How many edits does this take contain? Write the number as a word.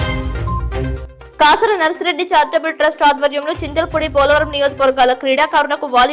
one